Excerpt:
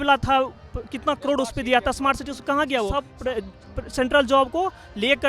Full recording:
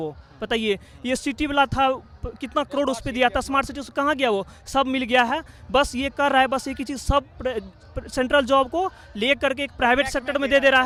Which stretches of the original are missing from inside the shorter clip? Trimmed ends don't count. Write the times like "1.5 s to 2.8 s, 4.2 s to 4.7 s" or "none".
4.5 s to 7.2 s